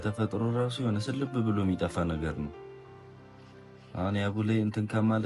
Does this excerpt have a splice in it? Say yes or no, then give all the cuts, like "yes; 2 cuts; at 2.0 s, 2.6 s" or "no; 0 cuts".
no; 0 cuts